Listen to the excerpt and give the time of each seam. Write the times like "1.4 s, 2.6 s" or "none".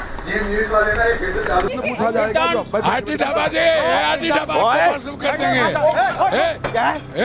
1.7 s

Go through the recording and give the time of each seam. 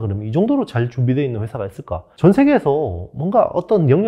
2.1 s

